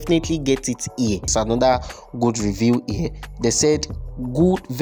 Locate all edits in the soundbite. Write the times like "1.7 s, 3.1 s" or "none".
1.3 s